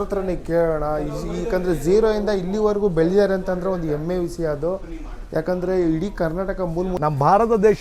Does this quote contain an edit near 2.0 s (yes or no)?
no